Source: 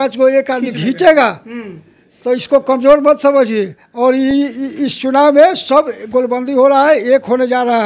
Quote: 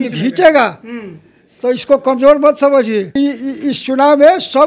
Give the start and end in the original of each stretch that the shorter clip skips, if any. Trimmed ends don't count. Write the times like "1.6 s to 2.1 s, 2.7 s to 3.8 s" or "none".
3.8 s to 4.3 s